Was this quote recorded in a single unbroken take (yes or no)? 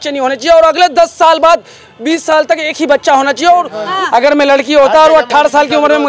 no